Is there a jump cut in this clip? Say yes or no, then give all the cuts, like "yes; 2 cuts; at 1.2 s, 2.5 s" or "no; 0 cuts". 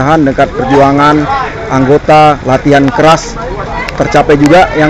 no; 0 cuts